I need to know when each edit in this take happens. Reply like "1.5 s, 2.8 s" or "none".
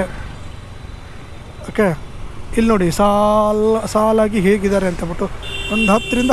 none